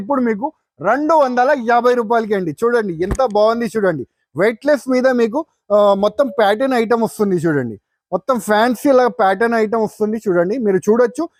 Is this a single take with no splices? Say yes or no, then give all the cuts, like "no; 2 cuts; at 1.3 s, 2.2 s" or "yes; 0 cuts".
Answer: yes; 0 cuts